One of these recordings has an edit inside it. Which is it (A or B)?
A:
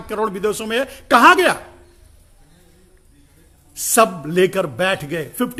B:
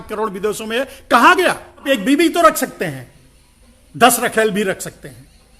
B